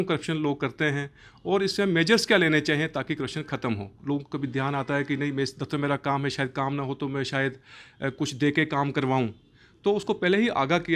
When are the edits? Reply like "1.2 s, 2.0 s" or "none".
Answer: 3.9 s